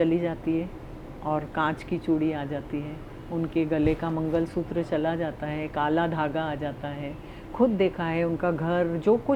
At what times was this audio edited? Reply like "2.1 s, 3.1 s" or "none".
none